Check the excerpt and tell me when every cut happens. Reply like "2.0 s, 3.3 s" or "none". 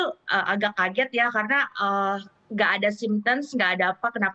none